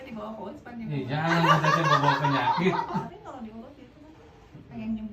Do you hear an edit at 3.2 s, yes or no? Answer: yes